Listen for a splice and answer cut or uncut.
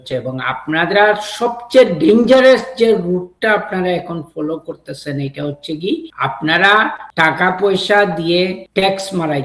cut